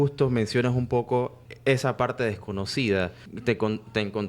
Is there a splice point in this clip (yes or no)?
yes